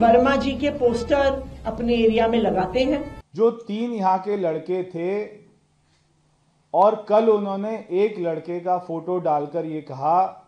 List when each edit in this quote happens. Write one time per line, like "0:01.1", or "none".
0:03.2